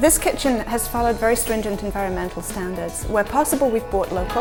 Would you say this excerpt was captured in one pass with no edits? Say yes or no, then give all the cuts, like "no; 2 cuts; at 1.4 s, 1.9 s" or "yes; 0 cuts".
yes; 0 cuts